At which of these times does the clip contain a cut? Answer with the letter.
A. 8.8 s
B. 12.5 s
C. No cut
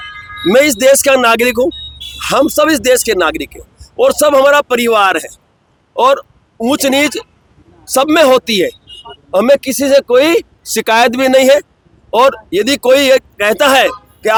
C